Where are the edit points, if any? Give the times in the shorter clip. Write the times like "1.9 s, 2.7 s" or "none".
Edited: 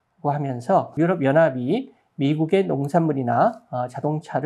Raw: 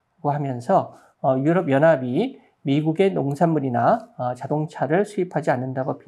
0.9 s